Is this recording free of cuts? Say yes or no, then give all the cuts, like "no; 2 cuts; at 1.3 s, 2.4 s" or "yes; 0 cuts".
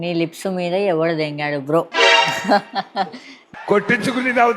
yes; 0 cuts